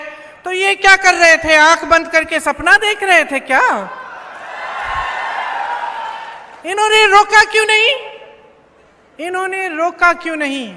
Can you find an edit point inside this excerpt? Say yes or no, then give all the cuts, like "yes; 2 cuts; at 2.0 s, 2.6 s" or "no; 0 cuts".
no; 0 cuts